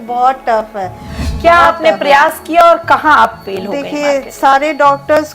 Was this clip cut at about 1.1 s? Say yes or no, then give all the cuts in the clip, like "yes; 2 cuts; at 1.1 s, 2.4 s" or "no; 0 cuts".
yes; 1 cut; at 1.1 s